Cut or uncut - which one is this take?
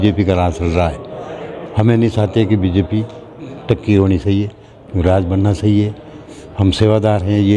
uncut